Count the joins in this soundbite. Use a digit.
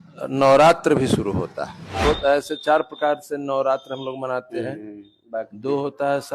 1